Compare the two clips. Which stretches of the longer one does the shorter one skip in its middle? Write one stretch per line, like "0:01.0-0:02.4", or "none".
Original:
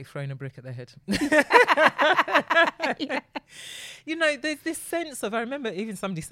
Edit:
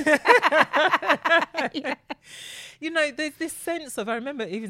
none